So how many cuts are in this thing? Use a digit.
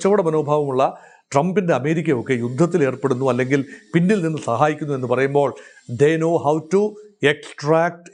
0